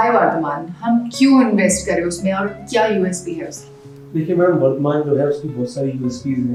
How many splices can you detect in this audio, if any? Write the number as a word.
zero